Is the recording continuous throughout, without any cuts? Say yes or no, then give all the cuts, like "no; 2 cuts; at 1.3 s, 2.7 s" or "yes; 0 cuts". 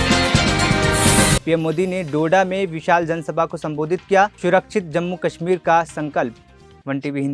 yes; 0 cuts